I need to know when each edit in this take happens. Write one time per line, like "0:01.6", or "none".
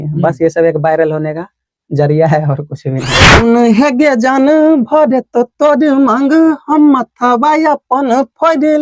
0:03.4